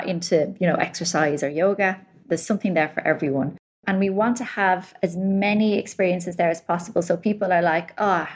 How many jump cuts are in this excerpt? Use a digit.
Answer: 2